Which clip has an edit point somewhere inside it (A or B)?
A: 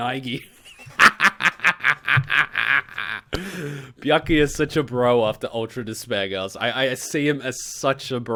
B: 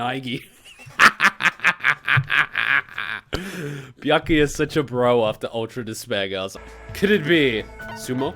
B